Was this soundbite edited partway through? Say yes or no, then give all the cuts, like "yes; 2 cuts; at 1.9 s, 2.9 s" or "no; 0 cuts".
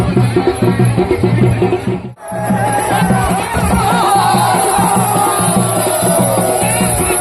yes; 1 cut; at 2.2 s